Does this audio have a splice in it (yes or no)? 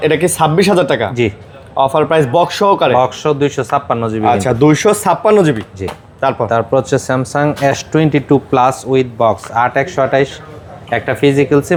no